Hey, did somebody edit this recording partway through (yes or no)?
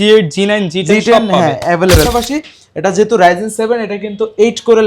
yes